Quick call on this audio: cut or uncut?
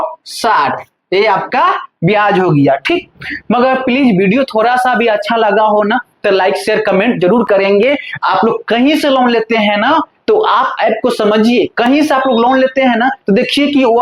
uncut